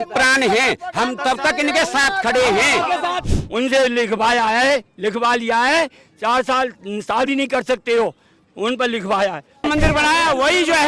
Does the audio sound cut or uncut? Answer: cut